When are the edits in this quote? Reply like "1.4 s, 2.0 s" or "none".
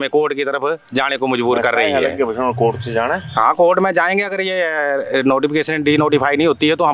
none